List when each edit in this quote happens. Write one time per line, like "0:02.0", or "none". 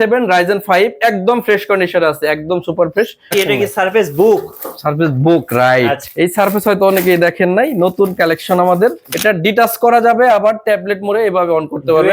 0:03.3
0:06.0
0:09.0